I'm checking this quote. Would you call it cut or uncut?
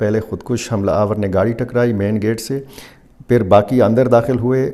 uncut